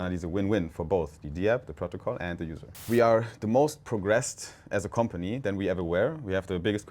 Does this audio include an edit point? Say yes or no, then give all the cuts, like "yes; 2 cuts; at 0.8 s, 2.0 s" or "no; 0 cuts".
yes; 1 cut; at 2.8 s